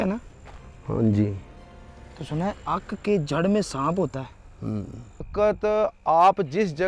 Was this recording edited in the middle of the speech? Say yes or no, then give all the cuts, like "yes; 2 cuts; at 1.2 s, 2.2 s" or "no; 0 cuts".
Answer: yes; 1 cut; at 5.3 s